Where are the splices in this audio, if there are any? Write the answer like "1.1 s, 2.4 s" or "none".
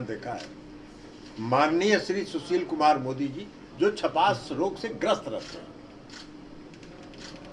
none